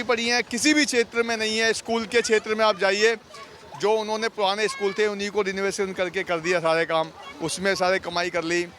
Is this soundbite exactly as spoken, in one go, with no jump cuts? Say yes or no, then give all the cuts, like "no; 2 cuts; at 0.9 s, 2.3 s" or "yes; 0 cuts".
yes; 0 cuts